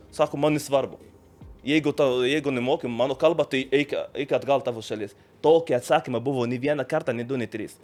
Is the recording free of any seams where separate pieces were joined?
yes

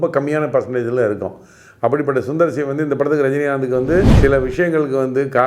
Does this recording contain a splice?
yes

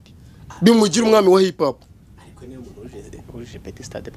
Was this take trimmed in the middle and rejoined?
no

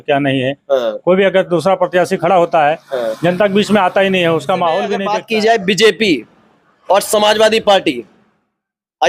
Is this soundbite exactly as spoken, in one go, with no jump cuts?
no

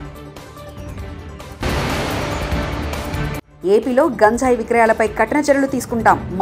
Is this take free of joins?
no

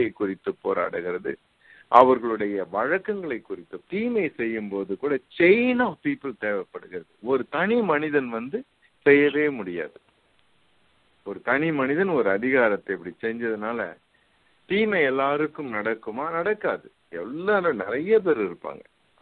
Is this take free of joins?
no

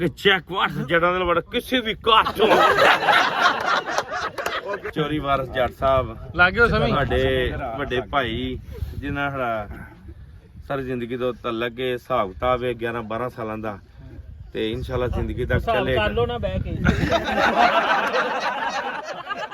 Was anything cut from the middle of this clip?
yes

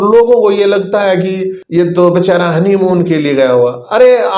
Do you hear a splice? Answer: yes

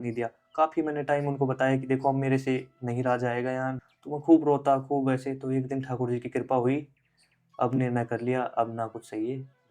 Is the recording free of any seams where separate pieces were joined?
no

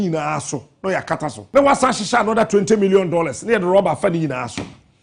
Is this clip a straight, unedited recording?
no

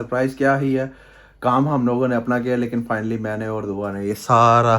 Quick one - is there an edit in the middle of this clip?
no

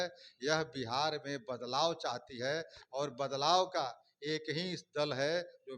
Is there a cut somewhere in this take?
no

